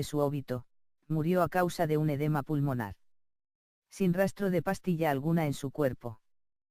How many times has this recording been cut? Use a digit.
1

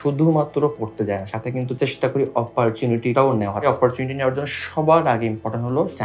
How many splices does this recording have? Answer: 0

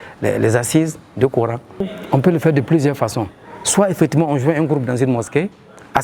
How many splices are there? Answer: 1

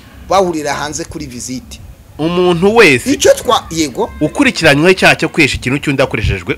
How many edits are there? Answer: 0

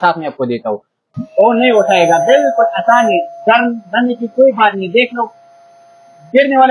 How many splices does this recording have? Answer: 1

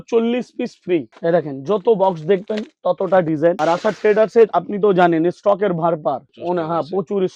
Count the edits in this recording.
1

